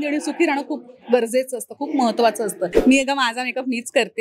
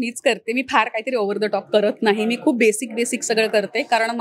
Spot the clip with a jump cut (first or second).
first